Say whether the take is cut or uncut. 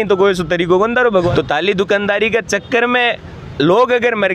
cut